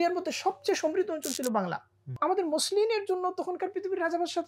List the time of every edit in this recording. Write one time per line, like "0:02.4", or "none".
0:02.2